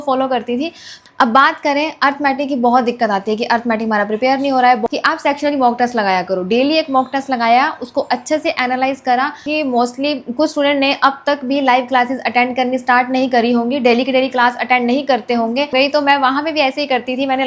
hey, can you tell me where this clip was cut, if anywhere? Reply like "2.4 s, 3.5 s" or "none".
1.0 s, 4.8 s, 9.5 s, 15.7 s